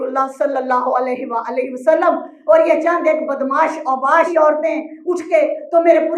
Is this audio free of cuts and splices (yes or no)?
no